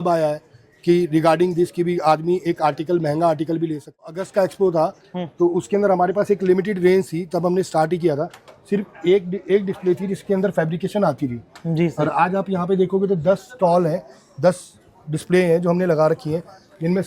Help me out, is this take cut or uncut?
cut